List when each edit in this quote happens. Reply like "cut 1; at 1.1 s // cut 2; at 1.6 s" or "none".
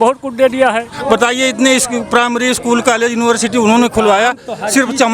cut 1; at 1.0 s